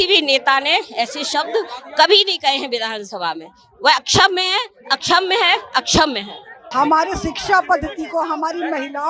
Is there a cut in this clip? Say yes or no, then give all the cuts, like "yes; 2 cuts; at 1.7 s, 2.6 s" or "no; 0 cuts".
yes; 1 cut; at 6.6 s